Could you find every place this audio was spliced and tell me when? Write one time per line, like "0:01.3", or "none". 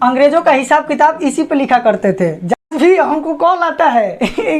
0:02.5